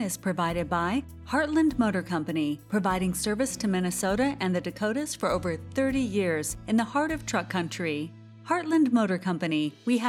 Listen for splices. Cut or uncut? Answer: uncut